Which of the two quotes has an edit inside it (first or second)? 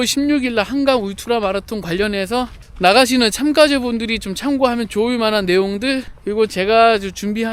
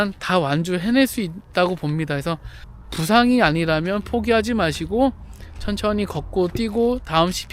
first